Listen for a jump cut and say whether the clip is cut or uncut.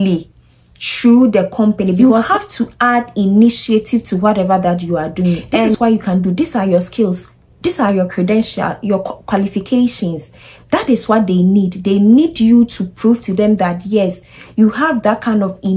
cut